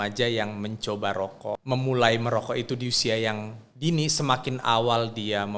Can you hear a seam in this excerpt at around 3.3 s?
no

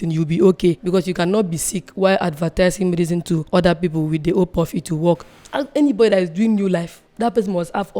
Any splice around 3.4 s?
yes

